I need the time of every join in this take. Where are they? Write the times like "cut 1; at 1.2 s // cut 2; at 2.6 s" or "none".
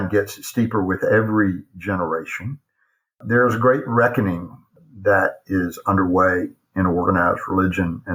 none